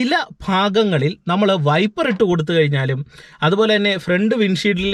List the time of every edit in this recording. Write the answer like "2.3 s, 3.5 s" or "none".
none